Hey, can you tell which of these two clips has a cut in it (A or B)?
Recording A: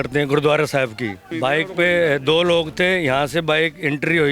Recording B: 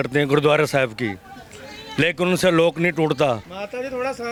A